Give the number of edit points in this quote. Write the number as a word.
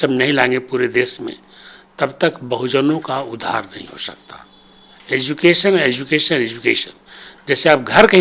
zero